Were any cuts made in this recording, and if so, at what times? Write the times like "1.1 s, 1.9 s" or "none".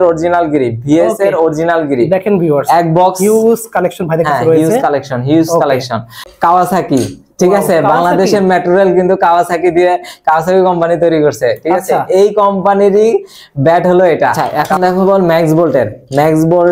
6.3 s, 14.5 s